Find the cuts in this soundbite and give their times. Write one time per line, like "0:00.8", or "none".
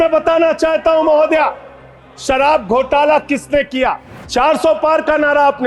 0:04.1